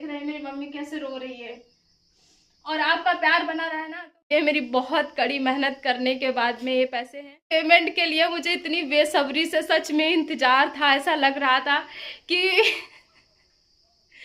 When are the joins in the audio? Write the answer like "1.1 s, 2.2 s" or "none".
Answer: 3.9 s, 7.3 s